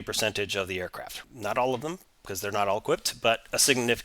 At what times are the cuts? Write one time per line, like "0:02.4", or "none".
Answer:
0:01.1